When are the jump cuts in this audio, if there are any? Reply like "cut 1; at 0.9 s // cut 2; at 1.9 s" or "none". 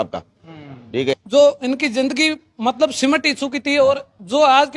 cut 1; at 1.1 s